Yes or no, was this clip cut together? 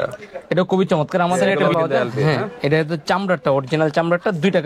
yes